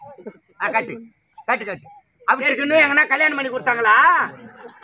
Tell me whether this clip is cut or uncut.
cut